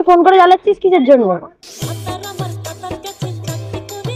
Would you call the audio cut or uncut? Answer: uncut